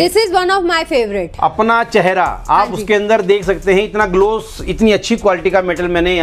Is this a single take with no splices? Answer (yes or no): yes